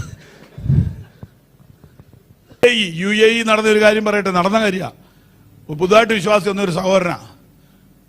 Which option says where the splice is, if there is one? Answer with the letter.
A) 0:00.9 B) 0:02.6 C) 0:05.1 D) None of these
B